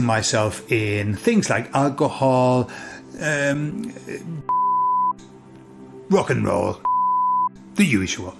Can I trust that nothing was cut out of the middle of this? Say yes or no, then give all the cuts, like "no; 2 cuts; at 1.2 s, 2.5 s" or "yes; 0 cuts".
yes; 0 cuts